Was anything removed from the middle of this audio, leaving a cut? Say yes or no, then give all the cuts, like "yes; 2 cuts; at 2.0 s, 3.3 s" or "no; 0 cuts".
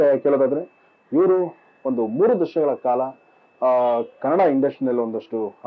no; 0 cuts